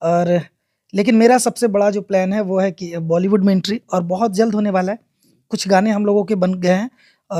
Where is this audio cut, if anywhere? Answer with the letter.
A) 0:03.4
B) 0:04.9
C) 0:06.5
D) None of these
D